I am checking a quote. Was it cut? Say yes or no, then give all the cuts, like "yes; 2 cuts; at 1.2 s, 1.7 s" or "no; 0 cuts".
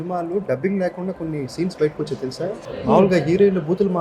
yes; 1 cut; at 2.7 s